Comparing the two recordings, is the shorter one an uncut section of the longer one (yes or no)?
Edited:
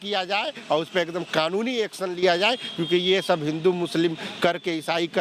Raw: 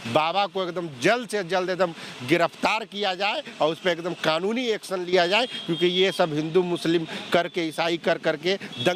yes